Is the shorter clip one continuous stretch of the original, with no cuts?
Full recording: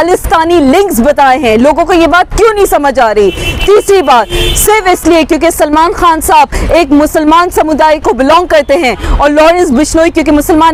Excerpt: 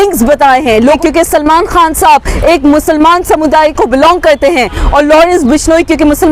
no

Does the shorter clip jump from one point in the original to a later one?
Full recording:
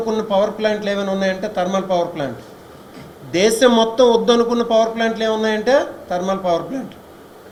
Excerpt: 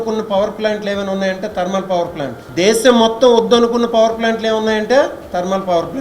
yes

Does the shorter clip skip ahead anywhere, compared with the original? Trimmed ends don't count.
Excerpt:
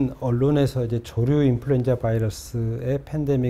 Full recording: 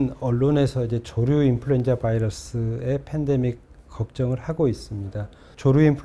no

